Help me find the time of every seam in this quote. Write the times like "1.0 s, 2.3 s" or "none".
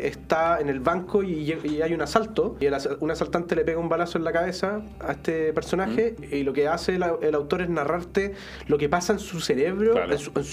2.6 s, 6.2 s